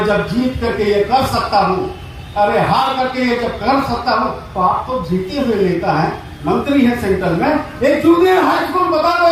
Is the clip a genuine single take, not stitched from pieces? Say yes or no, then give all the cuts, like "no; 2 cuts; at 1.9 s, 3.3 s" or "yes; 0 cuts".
yes; 0 cuts